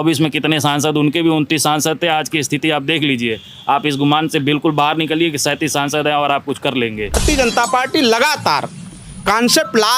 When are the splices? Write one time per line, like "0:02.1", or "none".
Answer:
0:07.2

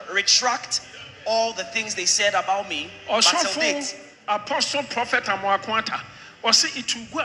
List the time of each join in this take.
none

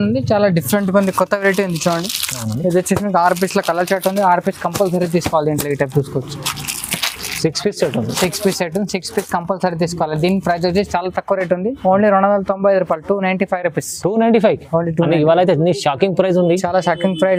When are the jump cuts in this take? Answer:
none

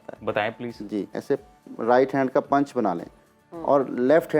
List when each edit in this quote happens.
0:01.1

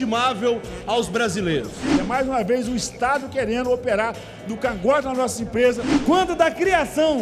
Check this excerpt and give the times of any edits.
0:01.9
0:05.9

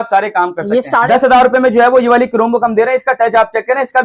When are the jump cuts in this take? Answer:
0:01.1

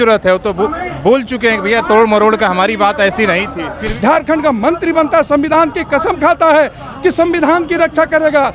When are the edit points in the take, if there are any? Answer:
0:03.8

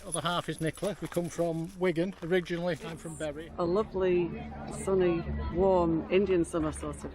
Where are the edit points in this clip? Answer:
0:03.1

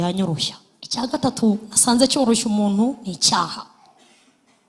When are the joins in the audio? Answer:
0:01.1

